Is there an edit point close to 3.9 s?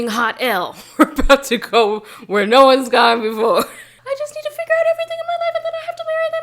yes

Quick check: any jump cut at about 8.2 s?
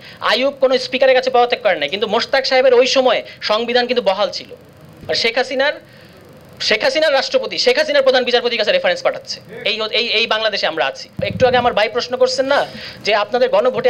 no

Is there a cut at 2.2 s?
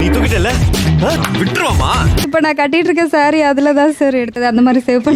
yes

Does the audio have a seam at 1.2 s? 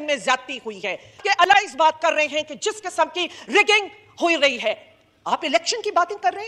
yes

